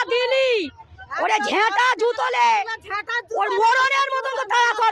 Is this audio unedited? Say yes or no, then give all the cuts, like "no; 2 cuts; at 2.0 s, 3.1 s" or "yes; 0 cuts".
yes; 0 cuts